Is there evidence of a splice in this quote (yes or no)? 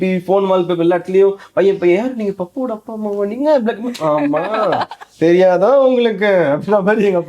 no